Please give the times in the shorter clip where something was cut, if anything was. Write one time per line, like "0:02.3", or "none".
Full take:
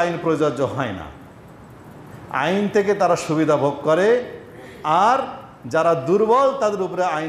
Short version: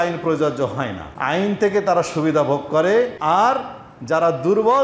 0:01.1
0:03.2

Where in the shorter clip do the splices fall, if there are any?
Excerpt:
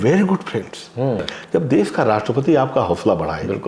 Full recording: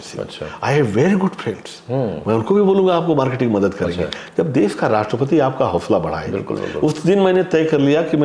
0:01.3

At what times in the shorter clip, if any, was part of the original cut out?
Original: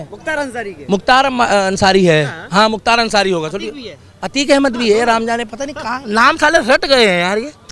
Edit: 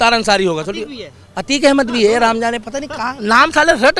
none

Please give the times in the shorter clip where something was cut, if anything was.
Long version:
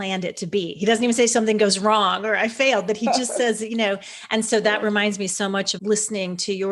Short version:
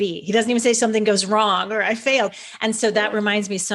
0:02.3

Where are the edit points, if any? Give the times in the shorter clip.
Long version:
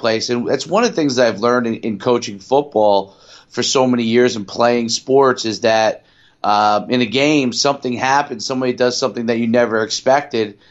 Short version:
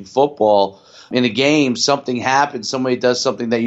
0:01.1

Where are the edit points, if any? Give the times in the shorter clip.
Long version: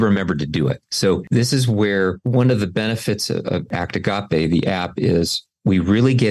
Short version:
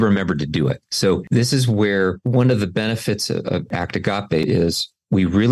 0:04.4

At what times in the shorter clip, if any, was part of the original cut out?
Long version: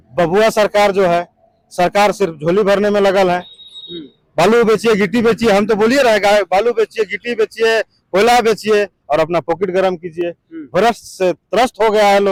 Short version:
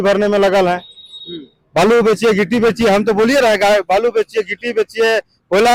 none

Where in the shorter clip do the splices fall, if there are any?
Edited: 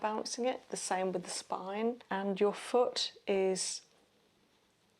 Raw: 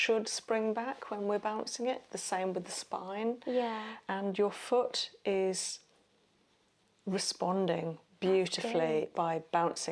0:02.0

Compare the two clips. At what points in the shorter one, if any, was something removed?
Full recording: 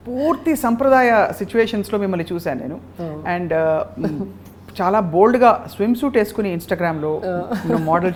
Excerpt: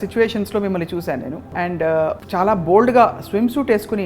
0:01.4
0:02.2

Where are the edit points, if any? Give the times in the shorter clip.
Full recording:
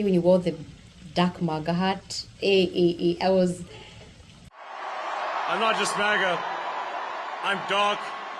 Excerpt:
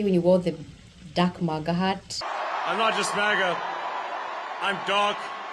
0:02.2

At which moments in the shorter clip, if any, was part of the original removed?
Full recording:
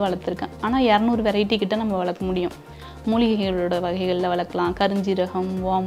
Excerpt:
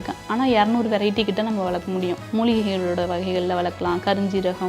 0:02.2

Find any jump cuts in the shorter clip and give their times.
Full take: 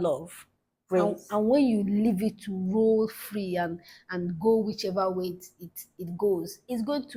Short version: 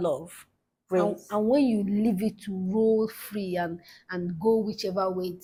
none

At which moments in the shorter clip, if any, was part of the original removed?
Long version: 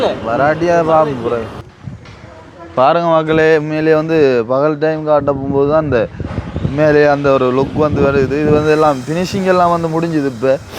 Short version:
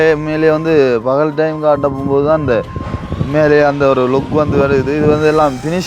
none

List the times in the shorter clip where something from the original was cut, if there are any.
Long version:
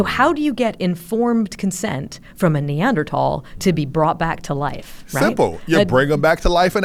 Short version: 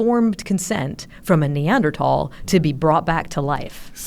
none

